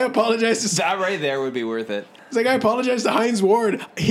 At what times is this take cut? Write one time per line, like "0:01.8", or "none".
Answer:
0:02.2